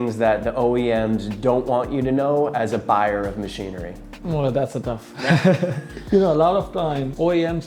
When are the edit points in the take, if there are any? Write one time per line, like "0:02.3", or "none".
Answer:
0:05.9